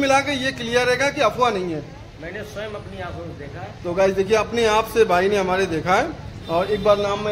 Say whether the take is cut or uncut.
uncut